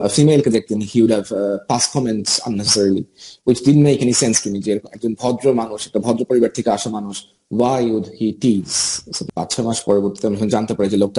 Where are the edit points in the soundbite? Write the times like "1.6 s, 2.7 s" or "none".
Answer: 9.2 s